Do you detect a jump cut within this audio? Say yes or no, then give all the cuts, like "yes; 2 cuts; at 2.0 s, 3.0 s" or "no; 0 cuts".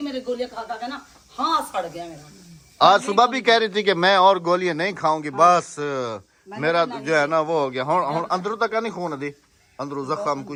no; 0 cuts